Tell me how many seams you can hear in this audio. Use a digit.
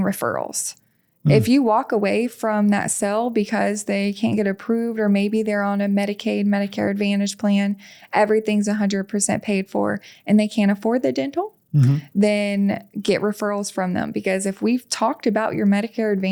0